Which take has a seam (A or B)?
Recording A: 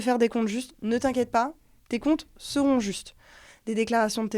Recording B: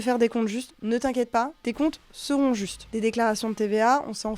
B